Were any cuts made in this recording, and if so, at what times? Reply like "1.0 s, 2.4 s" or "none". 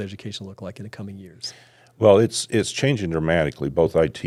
none